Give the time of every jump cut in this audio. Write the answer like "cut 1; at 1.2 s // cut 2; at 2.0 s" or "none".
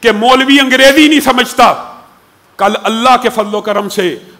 none